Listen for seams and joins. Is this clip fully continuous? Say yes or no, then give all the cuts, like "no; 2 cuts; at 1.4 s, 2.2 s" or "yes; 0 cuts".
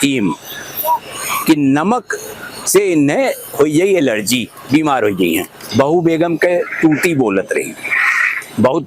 no; 1 cut; at 5.6 s